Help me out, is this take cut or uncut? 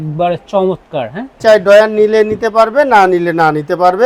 cut